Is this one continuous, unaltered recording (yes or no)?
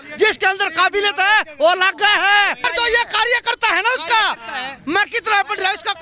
no